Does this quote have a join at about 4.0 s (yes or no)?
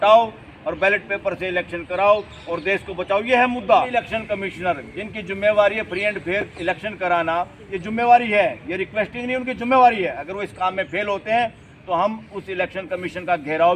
yes